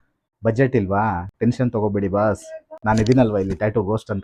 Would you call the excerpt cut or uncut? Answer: uncut